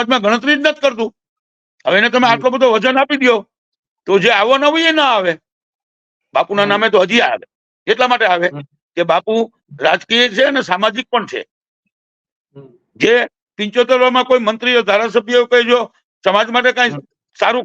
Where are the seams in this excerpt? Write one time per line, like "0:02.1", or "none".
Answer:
none